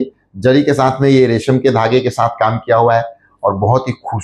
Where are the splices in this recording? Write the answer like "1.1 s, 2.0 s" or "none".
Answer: none